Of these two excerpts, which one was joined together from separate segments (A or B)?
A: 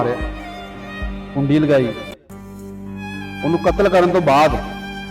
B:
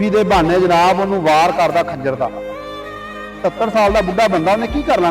A